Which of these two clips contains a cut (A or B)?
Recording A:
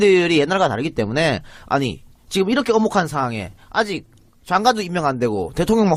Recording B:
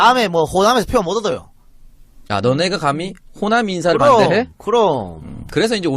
B